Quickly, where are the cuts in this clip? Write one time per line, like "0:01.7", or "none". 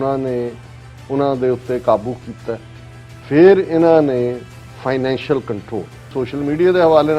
0:06.1